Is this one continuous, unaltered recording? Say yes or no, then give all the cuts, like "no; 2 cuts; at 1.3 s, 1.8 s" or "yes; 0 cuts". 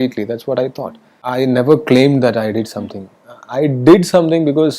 no; 1 cut; at 1.2 s